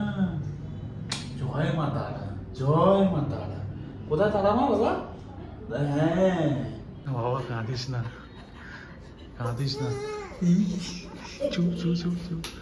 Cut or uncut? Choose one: cut